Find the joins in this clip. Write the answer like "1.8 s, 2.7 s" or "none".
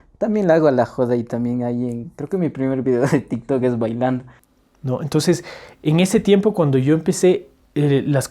4.3 s

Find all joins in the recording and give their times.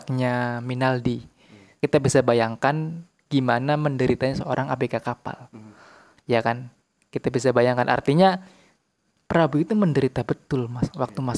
1.7 s

